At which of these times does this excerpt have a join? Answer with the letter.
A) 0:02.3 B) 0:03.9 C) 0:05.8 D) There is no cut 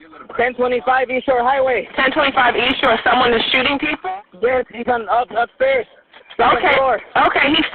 B